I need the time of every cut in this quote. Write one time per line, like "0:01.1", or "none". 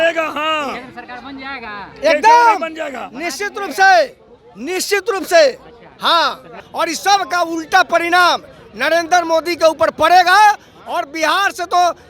0:06.6